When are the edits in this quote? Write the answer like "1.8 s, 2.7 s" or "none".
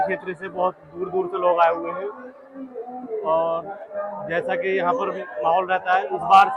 none